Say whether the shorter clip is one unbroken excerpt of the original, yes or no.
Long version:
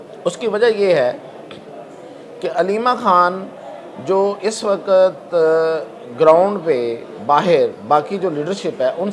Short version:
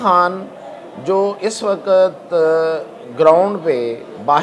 yes